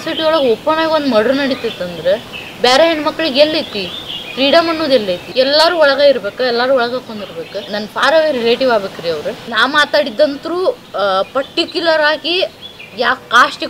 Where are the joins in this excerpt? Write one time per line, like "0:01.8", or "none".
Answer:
0:05.2
0:07.7
0:09.4